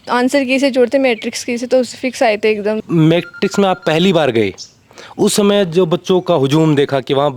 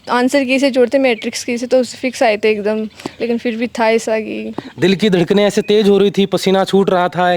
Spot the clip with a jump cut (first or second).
first